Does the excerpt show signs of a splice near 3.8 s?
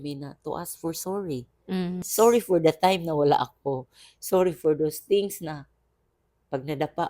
no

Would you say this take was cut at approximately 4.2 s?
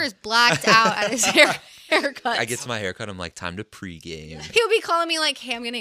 yes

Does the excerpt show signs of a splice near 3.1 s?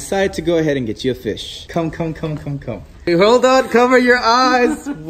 yes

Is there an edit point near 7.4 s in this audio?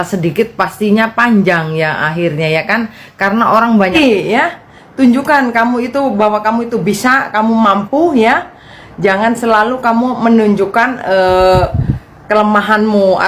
no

